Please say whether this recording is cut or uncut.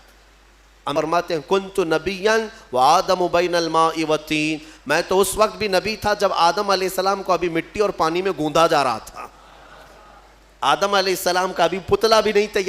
cut